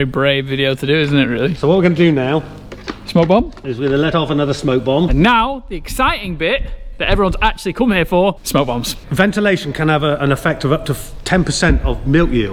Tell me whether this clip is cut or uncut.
uncut